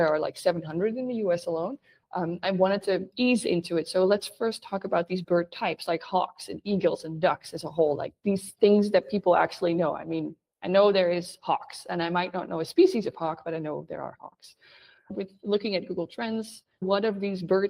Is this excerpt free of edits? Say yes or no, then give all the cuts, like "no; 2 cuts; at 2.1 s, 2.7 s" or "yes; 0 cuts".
yes; 0 cuts